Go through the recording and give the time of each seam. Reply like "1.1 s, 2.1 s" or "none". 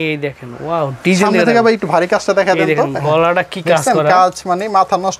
none